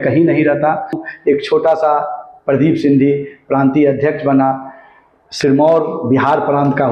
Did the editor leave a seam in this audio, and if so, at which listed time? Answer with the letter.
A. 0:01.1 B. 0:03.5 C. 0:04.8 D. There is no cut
A